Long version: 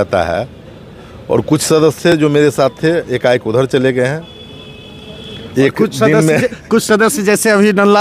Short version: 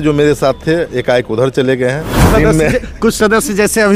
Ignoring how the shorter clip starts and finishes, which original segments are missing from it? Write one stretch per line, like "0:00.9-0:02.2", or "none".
0:04.4-0:05.9